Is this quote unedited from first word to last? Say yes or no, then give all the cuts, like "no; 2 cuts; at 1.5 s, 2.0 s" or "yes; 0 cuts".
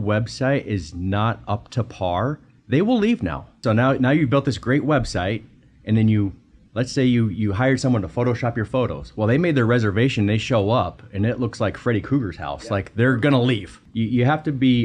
no; 2 cuts; at 3.5 s, 13.8 s